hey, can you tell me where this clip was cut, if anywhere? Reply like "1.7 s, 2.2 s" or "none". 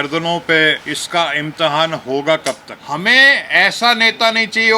0.9 s, 2.7 s